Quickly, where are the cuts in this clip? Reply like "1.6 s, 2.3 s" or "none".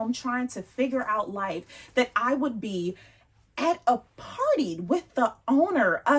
none